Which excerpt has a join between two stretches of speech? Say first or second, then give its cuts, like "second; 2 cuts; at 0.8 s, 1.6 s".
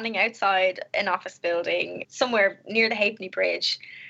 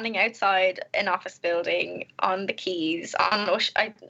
first; 1 cut; at 2.0 s